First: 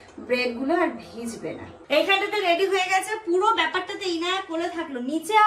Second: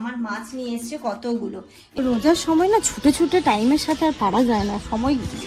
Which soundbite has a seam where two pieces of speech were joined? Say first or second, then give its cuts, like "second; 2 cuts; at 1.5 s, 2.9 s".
second; 1 cut; at 1.9 s